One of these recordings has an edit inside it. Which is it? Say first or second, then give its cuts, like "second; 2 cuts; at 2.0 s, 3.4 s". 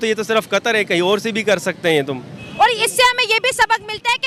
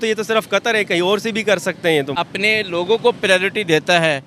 second; 1 cut; at 2.2 s